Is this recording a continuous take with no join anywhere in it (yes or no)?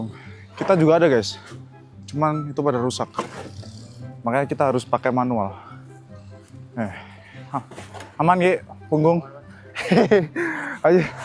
yes